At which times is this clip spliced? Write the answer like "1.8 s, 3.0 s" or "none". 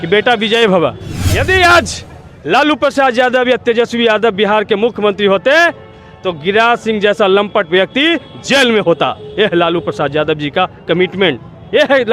1.1 s